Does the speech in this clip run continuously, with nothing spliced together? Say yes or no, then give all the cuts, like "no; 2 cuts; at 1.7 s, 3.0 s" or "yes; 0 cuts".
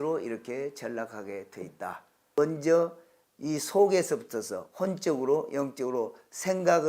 no; 1 cut; at 2.3 s